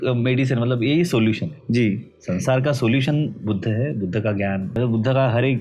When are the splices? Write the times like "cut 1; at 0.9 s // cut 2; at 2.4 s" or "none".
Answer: cut 1; at 4.7 s